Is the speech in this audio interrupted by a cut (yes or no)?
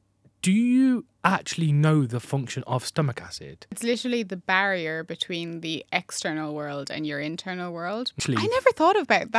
yes